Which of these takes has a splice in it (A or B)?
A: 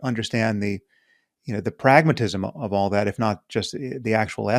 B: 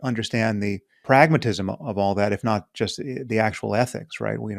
B